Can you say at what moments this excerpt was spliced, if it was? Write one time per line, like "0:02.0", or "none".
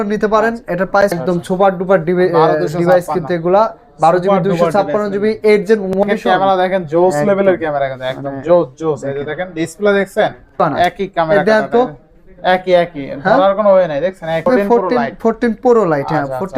0:01.2
0:06.0
0:10.5
0:14.4